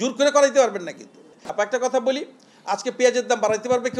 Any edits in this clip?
yes; 1 cut; at 1.5 s

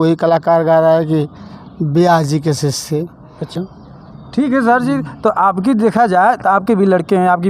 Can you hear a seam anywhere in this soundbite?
yes; 1 cut; at 3.6 s

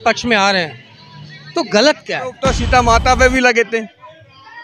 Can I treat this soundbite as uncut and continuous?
no; 1 cut; at 2.4 s

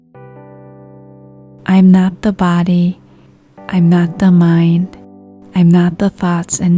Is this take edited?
yes; 1 cut; at 1.5 s

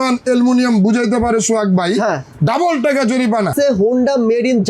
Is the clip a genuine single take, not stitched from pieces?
no; 1 cut; at 3.5 s

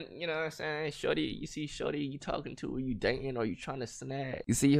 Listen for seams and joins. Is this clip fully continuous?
yes; 0 cuts

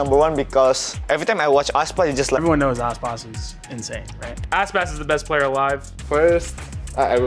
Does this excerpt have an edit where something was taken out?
yes; 1 cut; at 2.4 s

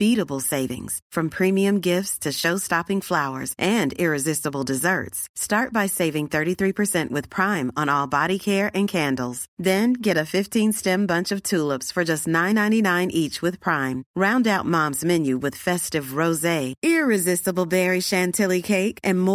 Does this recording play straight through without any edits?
yes; 0 cuts

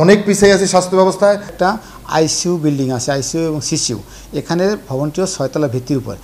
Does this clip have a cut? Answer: yes; 1 cut; at 1.5 s

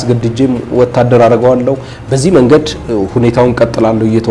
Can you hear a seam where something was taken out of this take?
no; 0 cuts

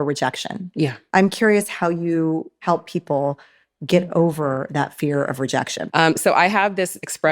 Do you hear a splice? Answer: yes; 2 cuts; at 1.1 s, 5.9 s

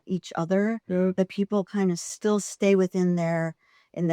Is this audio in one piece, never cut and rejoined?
no; 1 cut; at 2.0 s

